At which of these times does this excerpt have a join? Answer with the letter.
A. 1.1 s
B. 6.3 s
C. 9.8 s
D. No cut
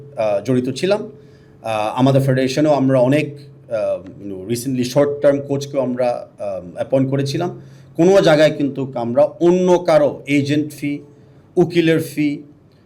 D